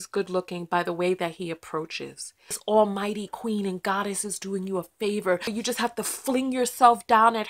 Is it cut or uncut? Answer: cut